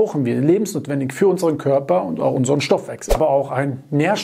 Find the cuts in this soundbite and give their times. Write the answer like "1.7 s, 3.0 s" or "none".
3.2 s